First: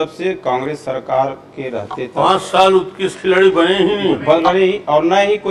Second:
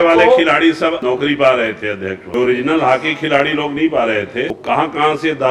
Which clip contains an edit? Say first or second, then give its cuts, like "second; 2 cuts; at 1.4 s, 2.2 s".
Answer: second; 3 cuts; at 1.0 s, 2.2 s, 4.6 s